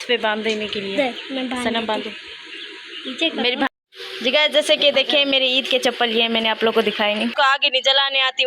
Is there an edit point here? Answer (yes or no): yes